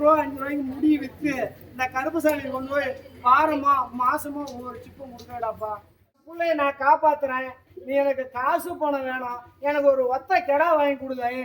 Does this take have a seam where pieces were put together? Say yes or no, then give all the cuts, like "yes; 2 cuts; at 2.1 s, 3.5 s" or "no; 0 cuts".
yes; 1 cut; at 6.2 s